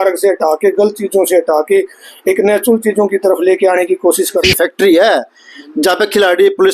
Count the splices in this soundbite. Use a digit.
1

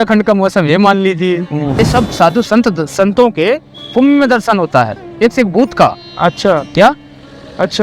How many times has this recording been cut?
1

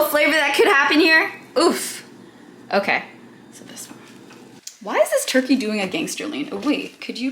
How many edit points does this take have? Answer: 1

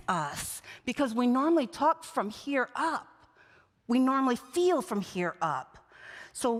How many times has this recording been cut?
0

